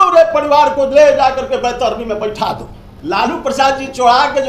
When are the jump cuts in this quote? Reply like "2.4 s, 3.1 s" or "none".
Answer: 3.0 s